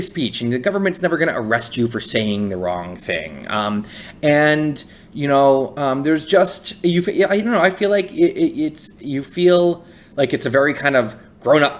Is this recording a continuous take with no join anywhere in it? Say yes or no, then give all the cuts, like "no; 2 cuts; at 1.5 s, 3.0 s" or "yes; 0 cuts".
yes; 0 cuts